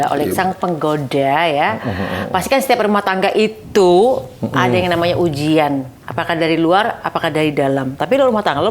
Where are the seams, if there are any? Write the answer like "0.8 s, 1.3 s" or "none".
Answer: none